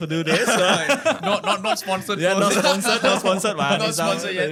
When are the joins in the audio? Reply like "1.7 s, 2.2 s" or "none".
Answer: none